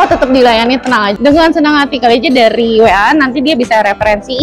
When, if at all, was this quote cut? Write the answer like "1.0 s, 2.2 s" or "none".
1.4 s